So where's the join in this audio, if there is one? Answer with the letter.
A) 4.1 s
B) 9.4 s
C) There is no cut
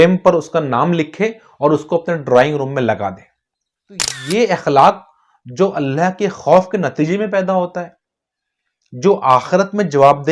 A